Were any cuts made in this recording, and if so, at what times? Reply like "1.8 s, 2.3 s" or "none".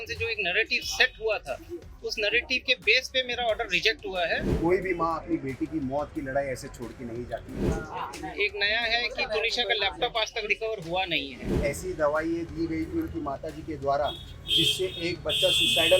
4.5 s, 7.6 s, 11.4 s